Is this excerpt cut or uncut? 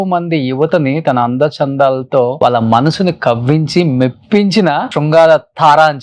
cut